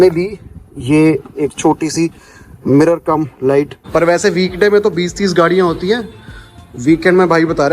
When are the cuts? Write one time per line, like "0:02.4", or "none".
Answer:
0:03.8